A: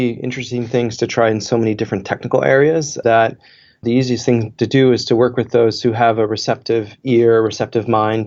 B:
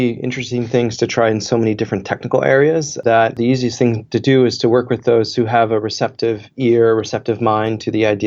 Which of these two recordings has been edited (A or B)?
B